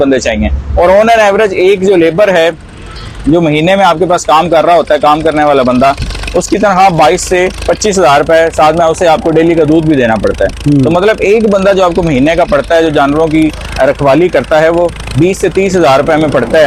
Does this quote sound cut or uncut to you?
uncut